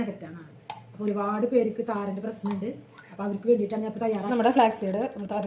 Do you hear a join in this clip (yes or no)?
yes